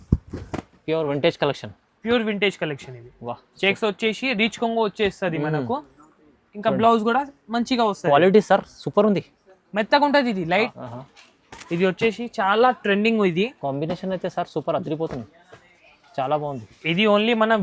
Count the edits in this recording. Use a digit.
1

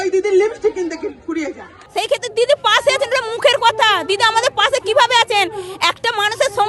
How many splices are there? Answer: 1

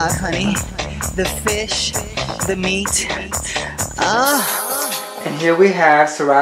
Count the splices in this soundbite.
1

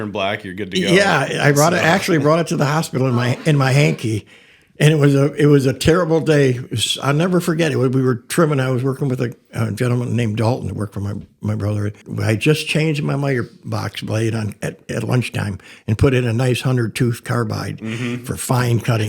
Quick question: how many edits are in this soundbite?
1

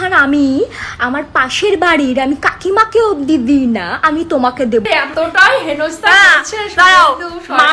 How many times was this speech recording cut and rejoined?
1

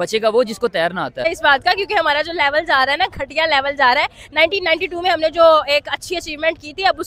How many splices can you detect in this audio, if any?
1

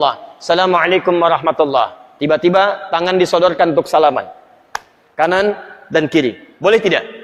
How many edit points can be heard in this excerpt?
0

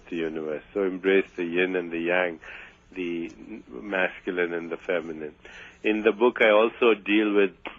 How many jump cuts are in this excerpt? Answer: 1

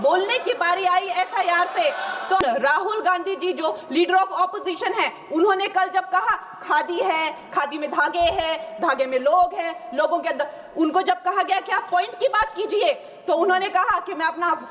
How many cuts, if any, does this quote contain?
1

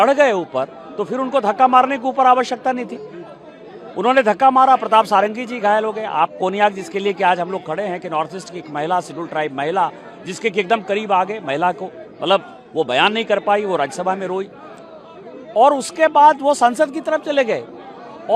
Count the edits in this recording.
0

